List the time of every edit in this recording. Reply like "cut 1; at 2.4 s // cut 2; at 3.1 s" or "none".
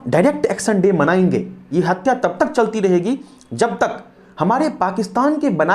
cut 1; at 1.6 s // cut 2; at 4.2 s